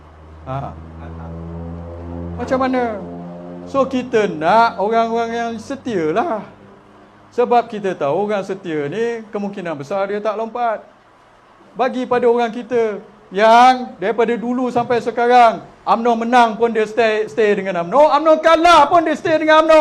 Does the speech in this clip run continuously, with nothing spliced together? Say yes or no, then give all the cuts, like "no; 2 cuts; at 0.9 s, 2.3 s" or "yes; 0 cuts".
yes; 0 cuts